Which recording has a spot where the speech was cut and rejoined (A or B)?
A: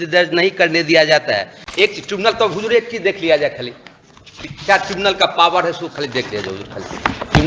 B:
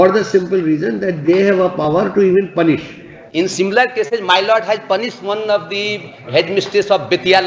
A